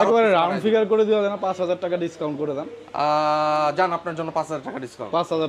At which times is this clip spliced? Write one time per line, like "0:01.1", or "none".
none